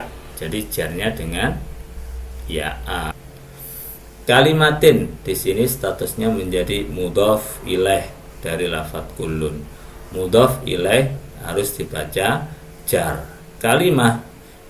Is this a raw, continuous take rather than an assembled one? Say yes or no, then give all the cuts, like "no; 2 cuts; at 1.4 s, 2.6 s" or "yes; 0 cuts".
no; 1 cut; at 3.2 s